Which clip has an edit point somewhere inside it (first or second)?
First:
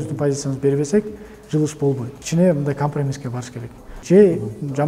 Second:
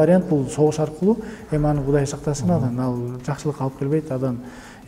first